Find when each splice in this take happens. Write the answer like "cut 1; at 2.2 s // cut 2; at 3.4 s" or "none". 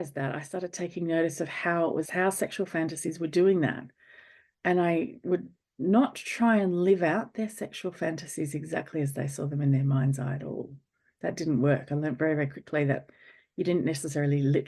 cut 1; at 2.1 s